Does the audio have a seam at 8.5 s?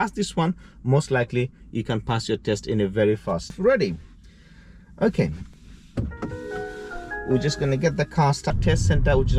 yes; 2 cuts; at 3.6 s, 8.5 s

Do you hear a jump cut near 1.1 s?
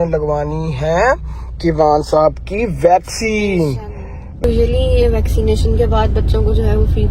no; 1 cut; at 4.4 s

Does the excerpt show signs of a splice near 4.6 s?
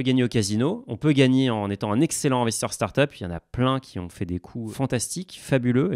yes; 1 cut; at 4.6 s

